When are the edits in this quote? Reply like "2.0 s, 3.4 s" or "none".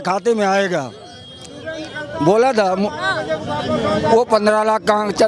none